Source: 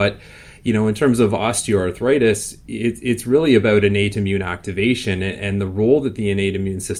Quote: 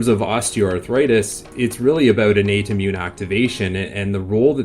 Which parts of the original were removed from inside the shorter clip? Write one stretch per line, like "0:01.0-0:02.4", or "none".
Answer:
0:02.6-0:03.0